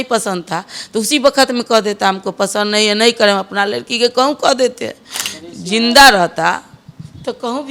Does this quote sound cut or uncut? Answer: uncut